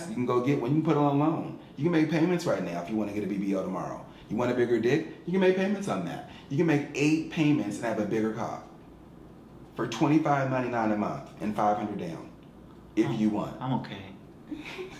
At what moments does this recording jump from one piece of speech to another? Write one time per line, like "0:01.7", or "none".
none